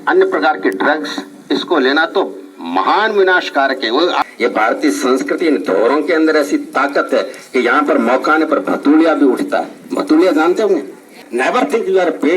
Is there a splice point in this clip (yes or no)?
yes